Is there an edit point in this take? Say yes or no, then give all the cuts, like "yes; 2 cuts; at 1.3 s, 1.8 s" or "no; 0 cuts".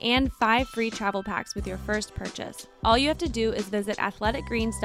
yes; 1 cut; at 2.6 s